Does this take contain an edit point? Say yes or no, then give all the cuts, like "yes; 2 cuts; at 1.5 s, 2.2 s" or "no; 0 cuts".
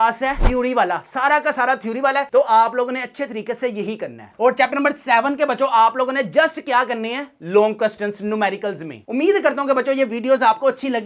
no; 0 cuts